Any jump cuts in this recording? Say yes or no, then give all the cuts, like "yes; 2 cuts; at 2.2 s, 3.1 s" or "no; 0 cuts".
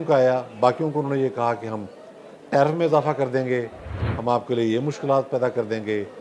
no; 0 cuts